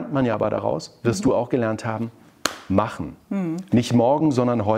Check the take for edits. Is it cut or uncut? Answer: uncut